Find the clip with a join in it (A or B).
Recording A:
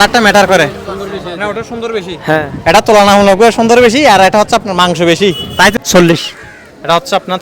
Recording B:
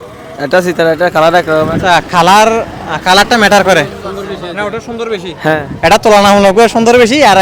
A